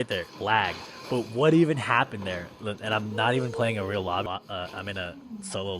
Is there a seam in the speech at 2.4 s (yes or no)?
no